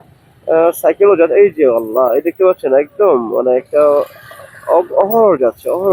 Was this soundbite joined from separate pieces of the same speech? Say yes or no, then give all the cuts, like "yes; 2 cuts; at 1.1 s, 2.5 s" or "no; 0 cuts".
no; 0 cuts